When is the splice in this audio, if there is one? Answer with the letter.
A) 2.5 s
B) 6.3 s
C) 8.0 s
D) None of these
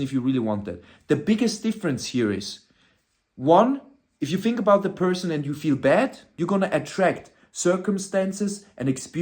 B